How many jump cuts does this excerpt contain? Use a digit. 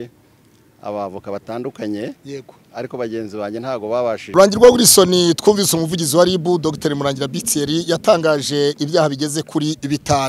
1